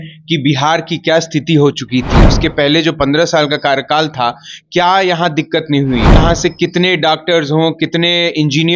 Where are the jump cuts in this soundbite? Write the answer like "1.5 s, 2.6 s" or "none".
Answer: 2.2 s, 6.2 s